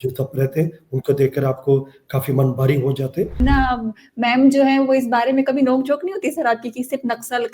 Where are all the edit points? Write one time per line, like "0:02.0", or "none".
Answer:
0:03.4